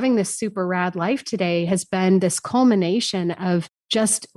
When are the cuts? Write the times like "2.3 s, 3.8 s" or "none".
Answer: 2.4 s